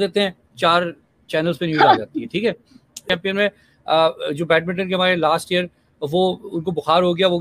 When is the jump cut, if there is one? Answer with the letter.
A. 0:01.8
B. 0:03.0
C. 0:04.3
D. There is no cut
B